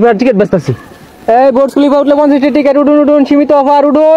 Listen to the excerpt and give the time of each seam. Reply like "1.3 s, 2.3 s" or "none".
none